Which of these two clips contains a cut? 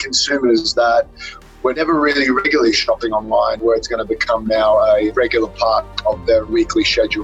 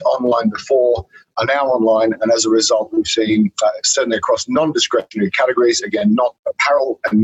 first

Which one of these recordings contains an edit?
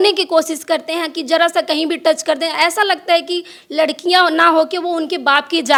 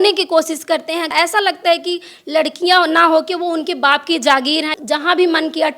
second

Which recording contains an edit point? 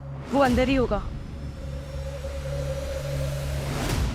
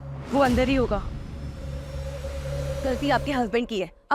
second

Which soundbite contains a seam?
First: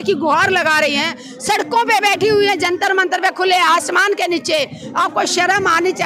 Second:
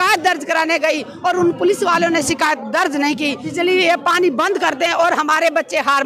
second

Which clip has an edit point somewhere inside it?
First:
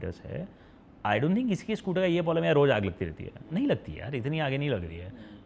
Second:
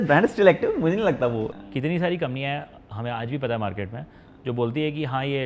second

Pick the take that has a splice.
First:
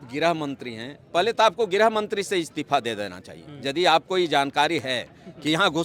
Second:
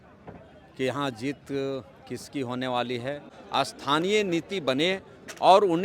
second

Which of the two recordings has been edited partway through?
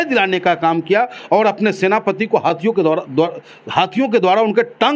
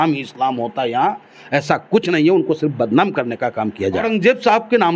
second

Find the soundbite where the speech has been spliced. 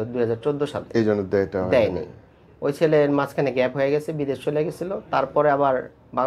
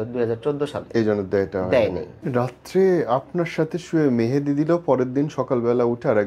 second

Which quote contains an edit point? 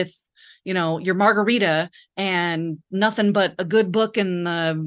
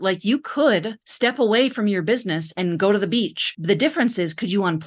second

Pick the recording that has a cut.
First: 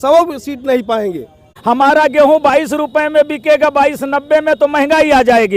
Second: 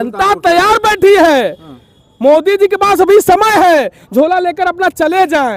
first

